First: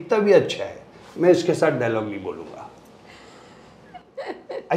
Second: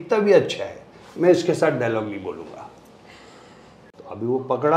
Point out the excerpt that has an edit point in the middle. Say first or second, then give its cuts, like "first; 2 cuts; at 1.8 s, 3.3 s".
second; 1 cut; at 3.9 s